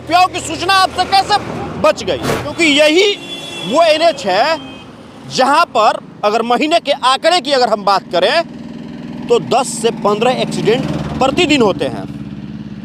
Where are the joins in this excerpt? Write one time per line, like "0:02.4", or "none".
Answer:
0:02.5